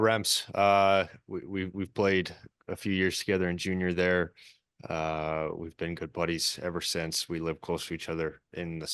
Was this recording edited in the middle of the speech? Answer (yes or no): no